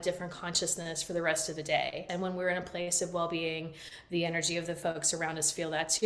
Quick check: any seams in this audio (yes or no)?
yes